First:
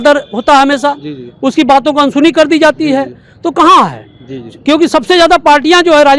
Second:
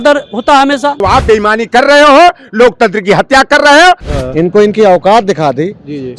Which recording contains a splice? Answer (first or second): second